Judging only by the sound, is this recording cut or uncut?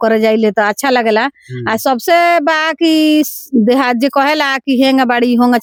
uncut